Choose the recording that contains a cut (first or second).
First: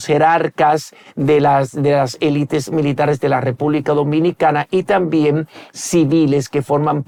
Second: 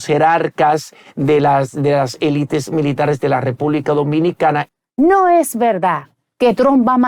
second